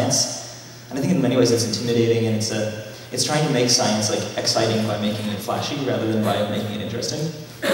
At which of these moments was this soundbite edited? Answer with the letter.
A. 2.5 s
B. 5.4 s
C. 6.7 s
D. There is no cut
C